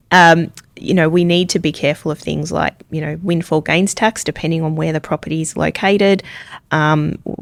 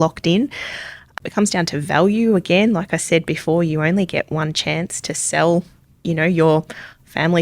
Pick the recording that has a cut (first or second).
second